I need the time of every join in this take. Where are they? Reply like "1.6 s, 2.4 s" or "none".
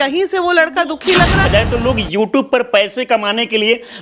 1.5 s